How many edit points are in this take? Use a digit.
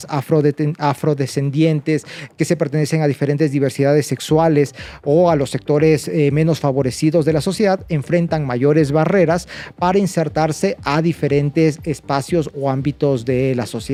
0